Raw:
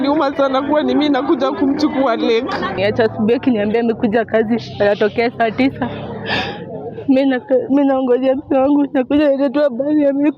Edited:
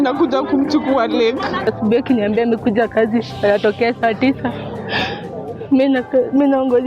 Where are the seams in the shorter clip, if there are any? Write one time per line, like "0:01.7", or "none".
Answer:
0:01.7